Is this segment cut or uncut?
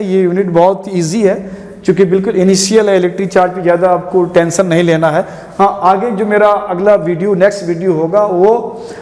uncut